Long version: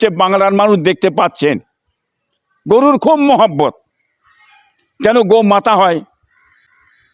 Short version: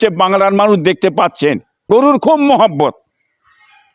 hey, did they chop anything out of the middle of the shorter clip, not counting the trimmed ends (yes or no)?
yes